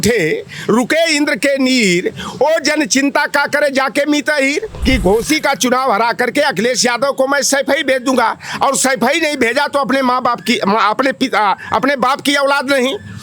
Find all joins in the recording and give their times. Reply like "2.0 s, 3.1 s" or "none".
4.7 s